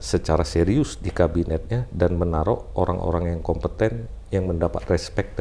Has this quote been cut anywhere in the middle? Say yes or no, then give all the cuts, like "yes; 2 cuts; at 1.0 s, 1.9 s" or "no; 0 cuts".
no; 0 cuts